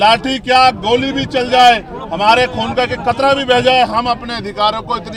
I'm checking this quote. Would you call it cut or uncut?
uncut